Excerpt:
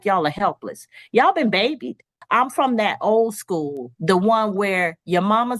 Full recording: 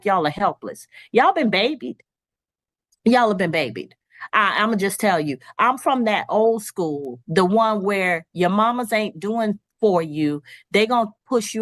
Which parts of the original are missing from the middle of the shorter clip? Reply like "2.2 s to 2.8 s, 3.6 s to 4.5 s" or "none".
2.1 s to 5.4 s